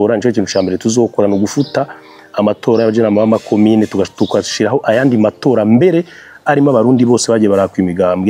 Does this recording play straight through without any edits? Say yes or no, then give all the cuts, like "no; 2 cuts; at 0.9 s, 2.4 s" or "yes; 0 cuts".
yes; 0 cuts